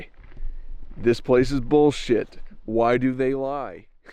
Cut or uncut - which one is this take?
uncut